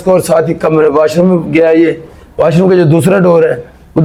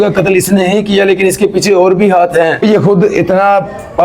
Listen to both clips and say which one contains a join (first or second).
second